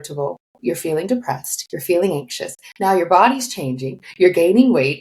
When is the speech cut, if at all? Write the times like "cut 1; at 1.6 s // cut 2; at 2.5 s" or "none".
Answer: none